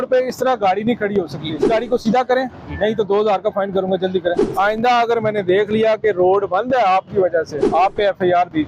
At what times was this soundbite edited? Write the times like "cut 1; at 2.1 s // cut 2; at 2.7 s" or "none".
cut 1; at 1.7 s // cut 2; at 4.4 s // cut 3; at 7.6 s

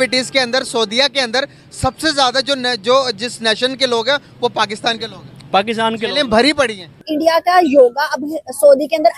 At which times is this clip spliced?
cut 1; at 7.0 s

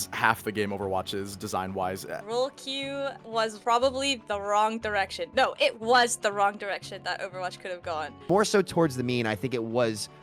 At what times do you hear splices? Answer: cut 1; at 2.2 s // cut 2; at 3.3 s // cut 3; at 8.1 s

